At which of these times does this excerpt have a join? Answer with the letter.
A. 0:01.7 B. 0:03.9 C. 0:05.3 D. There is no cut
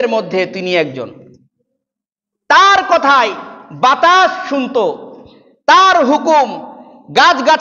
D